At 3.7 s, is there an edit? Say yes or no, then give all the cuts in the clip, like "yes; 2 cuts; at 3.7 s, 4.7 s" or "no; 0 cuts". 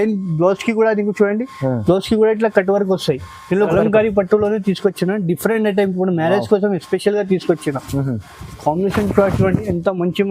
yes; 1 cut; at 3.7 s